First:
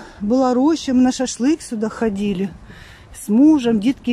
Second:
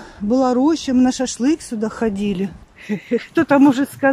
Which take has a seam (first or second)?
second